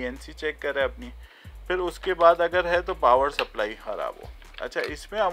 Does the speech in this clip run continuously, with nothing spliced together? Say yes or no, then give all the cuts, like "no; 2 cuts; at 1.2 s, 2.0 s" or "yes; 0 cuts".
yes; 0 cuts